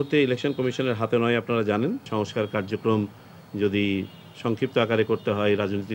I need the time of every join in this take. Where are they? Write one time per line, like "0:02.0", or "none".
0:02.1